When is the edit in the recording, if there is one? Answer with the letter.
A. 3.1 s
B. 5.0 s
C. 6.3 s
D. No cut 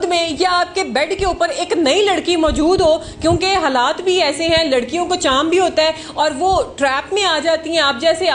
D